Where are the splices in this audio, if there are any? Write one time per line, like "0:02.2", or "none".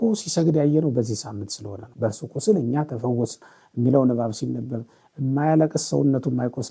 0:01.8